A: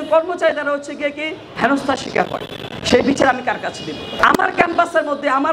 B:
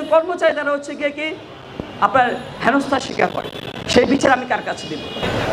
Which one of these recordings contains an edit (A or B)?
A